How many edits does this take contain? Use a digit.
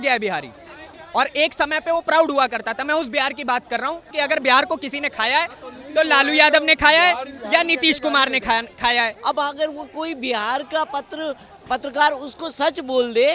2